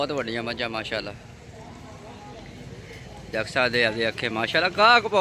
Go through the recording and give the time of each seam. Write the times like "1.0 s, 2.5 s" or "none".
none

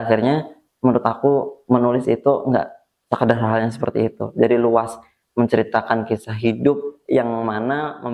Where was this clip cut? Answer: none

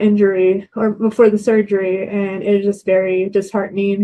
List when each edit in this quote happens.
none

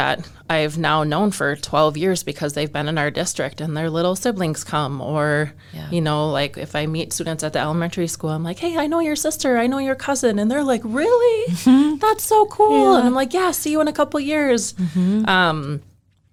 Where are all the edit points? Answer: none

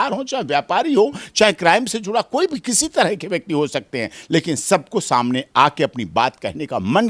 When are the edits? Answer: none

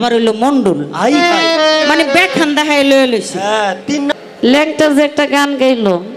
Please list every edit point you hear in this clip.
4.1 s

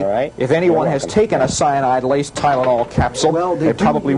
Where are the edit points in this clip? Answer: none

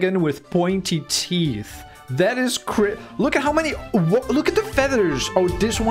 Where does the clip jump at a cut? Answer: none

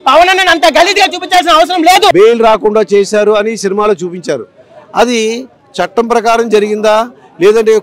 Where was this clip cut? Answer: 2.1 s

